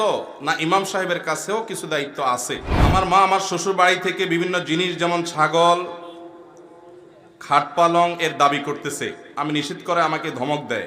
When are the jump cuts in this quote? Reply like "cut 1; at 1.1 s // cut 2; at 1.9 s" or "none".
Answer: cut 1; at 2.7 s